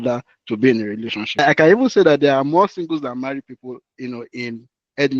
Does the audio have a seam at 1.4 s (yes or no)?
yes